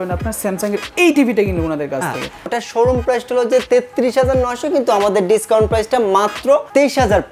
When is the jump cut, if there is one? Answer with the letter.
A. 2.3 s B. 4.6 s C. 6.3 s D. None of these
A